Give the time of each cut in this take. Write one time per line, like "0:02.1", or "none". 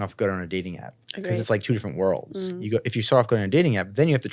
none